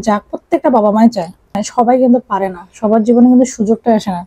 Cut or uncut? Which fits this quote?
cut